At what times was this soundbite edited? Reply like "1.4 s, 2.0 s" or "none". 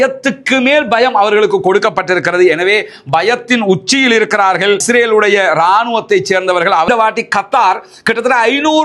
6.9 s